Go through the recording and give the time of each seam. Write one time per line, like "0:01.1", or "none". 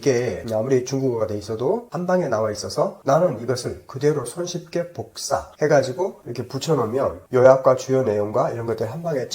0:01.9
0:06.3